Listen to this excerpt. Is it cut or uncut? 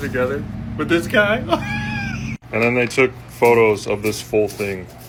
uncut